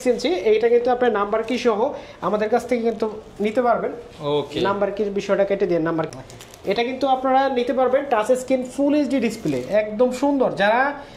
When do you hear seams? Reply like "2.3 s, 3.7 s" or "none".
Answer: none